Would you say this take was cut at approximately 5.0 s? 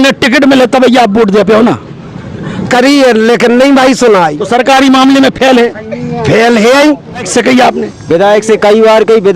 no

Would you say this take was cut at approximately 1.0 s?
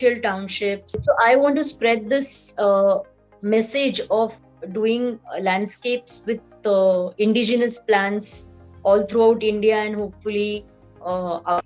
yes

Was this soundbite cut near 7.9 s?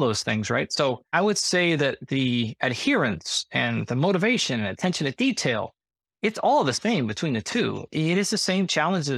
yes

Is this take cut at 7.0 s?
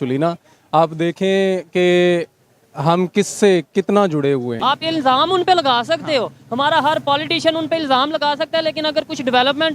no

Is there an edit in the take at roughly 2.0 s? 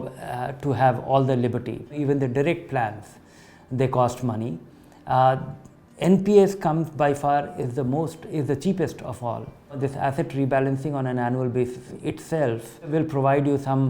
yes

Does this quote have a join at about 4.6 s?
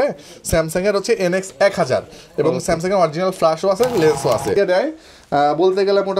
yes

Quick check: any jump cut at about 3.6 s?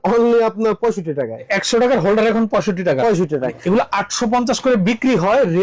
yes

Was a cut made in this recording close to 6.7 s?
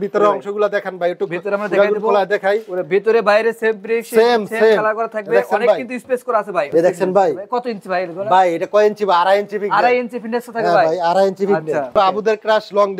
yes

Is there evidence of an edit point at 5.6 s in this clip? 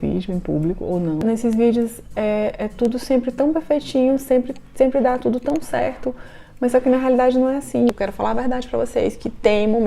no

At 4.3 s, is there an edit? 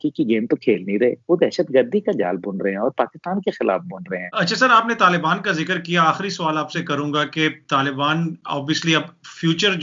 no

